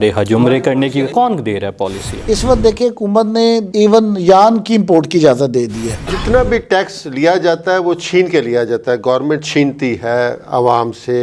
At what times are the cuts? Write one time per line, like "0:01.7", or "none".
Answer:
0:01.1
0:02.2
0:05.9